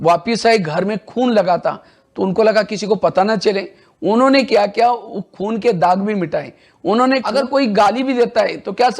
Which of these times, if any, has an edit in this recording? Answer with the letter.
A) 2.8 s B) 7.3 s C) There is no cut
B